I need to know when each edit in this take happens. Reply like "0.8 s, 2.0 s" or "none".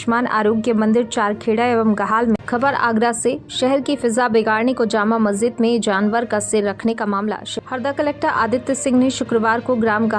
2.4 s, 7.5 s